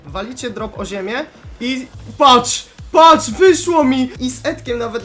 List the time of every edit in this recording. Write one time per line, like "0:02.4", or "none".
0:04.2